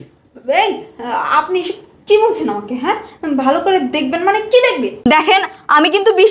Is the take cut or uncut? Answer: uncut